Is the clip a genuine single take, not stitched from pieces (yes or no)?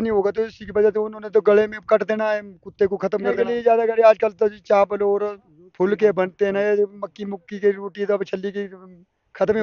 no